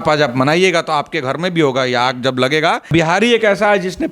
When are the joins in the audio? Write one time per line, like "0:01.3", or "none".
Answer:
0:02.9